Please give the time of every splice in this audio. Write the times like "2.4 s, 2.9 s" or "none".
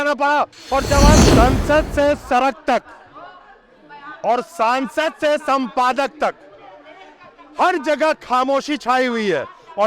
1.2 s